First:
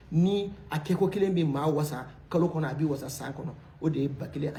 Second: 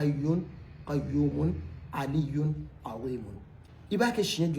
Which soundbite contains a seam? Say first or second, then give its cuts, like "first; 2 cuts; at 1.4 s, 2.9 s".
second; 1 cut; at 3.6 s